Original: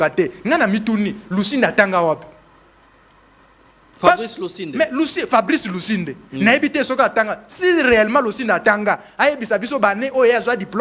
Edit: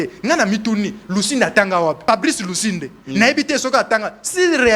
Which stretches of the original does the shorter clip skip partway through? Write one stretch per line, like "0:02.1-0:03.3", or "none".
0:02.2-0:05.3

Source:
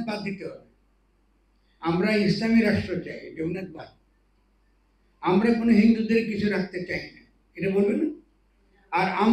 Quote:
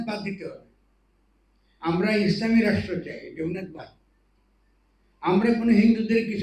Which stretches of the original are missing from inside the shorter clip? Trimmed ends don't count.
none

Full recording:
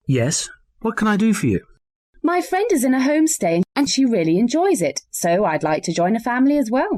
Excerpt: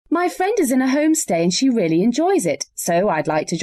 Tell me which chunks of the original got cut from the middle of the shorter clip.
0:03.7-0:03.9

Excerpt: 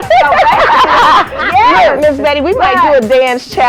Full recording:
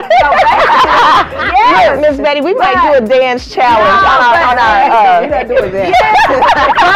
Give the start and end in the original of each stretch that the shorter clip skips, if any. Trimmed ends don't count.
none

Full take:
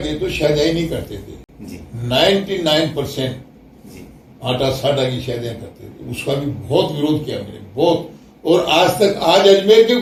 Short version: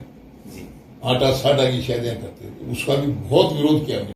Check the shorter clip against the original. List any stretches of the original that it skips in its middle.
none

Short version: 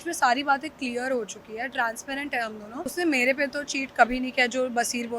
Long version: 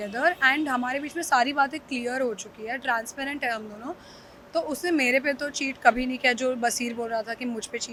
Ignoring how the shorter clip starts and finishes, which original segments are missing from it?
0:04.0-0:04.7

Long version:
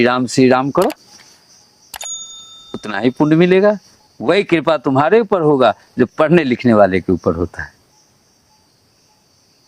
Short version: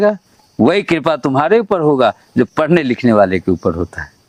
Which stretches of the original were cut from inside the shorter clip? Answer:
none

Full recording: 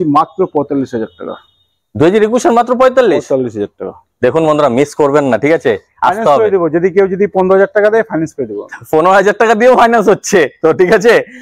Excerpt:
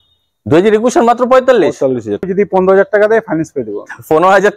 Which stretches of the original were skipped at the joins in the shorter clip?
0:03.8-0:07.1

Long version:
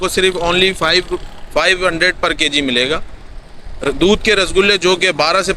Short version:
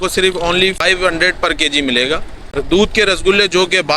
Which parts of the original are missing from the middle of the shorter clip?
0:00.8-0:01.6
0:03.2-0:03.7

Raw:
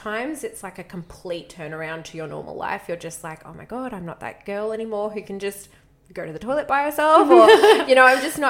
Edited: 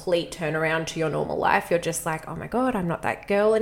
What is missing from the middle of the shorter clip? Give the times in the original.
none

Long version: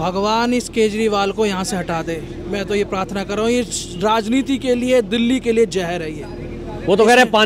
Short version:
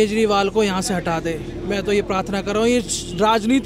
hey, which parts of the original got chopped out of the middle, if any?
none

